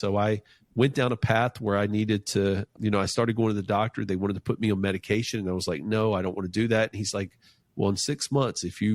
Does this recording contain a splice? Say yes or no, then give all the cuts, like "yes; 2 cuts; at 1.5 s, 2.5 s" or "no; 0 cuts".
yes; 1 cut; at 2.7 s